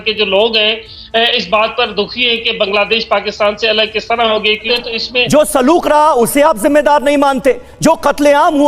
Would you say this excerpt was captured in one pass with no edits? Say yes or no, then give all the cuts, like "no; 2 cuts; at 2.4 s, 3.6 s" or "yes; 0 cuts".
no; 1 cut; at 4.7 s